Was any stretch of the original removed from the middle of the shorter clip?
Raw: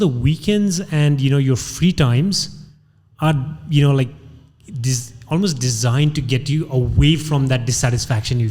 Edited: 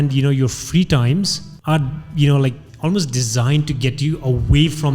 yes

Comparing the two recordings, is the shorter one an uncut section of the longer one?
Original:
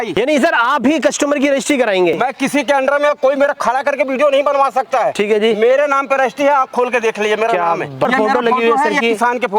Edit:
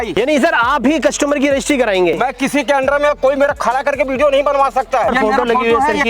no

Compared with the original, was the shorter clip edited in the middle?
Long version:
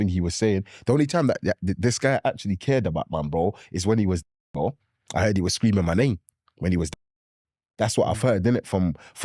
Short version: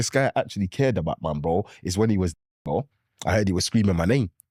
no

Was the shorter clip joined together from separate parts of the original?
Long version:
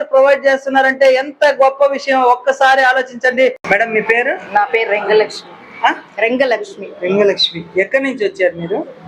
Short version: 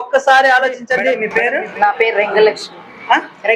yes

